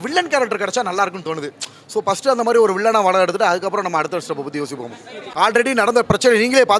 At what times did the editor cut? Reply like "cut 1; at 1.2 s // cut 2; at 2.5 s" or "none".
cut 1; at 5.2 s